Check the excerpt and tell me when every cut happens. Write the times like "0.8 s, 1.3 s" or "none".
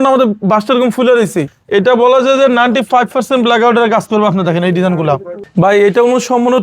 1.5 s, 5.4 s